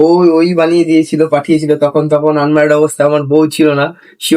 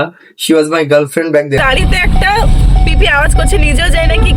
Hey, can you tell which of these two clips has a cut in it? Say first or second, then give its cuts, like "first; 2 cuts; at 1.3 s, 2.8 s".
second; 1 cut; at 1.6 s